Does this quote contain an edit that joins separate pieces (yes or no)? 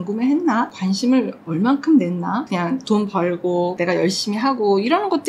no